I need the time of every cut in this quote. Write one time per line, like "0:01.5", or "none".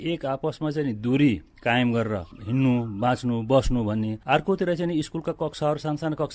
0:02.3
0:04.2

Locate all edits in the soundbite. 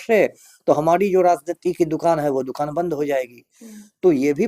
none

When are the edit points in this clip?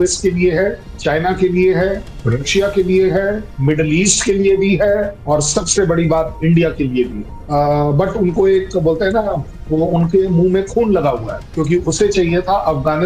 0:07.4
0:11.4

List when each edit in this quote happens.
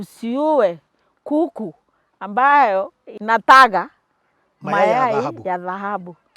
0:03.1

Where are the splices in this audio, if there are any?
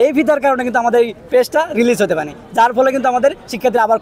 none

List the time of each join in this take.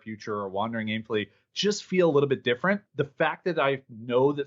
0:02.9

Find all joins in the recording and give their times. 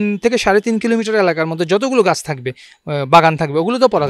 none

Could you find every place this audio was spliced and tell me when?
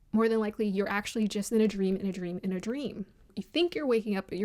0:03.4

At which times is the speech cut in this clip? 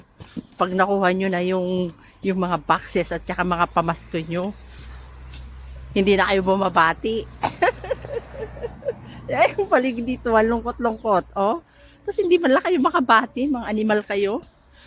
none

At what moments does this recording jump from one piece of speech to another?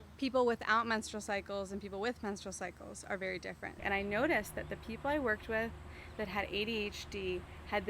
0:03.8

